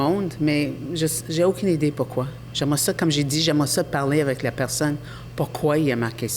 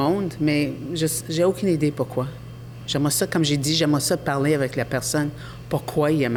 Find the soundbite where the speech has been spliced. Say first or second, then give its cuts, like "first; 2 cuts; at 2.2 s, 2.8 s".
first; 1 cut; at 2.4 s